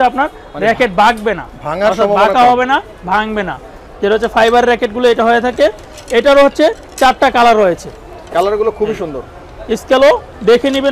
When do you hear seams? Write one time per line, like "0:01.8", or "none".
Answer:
none

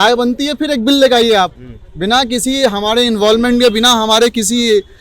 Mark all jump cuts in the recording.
none

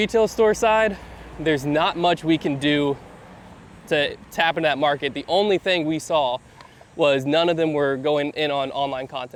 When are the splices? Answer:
none

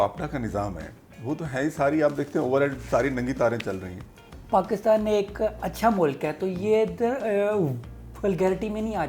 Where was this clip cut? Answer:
0:04.3

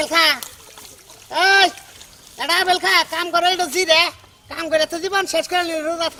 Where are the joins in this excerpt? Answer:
none

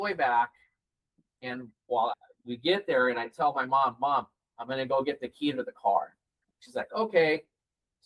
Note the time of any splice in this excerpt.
none

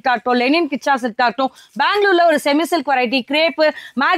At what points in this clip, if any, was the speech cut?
none

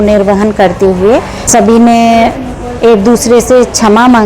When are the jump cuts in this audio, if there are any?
0:01.5

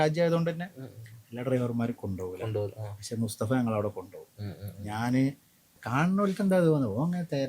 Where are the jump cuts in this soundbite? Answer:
0:05.8

